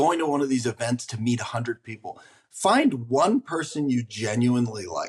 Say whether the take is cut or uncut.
uncut